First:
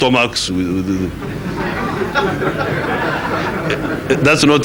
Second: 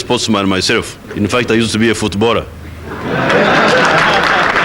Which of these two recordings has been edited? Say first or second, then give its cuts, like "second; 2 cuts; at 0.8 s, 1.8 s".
second; 1 cut; at 1.0 s